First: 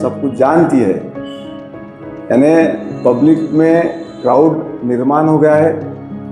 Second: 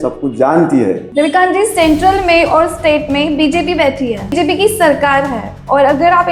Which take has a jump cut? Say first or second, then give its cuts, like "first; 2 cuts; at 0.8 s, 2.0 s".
second; 2 cuts; at 1.0 s, 4.3 s